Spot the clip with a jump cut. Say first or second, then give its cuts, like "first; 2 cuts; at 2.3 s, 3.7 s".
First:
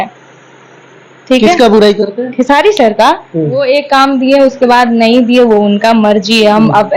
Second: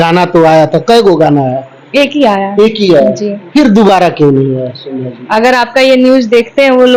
first; 1 cut; at 3.6 s